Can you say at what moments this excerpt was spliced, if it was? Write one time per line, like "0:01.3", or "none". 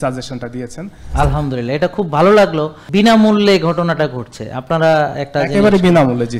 0:01.0
0:02.8